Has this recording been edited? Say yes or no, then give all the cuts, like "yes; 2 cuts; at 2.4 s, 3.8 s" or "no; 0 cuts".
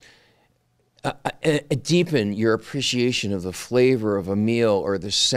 no; 0 cuts